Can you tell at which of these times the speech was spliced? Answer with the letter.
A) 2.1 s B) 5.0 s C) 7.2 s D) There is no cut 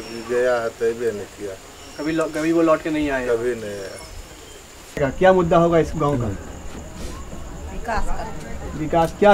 B